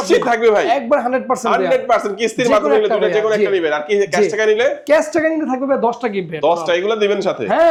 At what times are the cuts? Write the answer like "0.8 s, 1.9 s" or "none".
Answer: none